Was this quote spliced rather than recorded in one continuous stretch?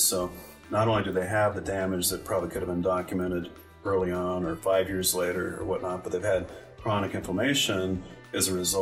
no; 0 cuts

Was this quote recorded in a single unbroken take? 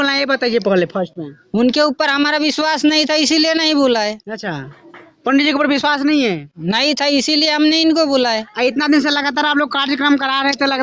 yes; 0 cuts

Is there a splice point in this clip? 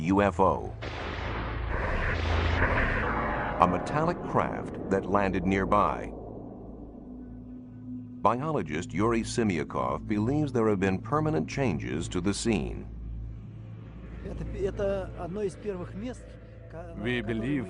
no; 0 cuts

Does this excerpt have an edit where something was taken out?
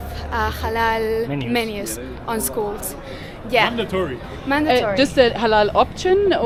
no; 0 cuts

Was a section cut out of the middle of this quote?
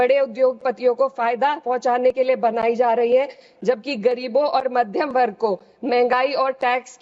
no; 0 cuts

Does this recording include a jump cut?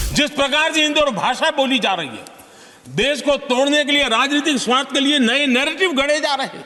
no; 0 cuts

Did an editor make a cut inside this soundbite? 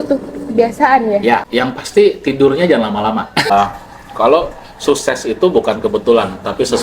yes; 2 cuts; at 1.5 s, 3.5 s

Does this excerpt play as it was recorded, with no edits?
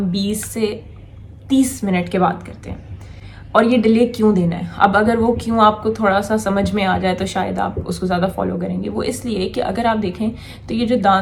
yes; 0 cuts

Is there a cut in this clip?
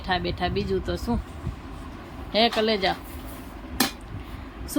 no; 0 cuts

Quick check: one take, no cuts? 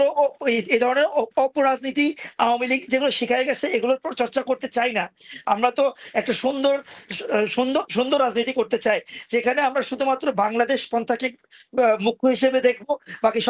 yes; 0 cuts

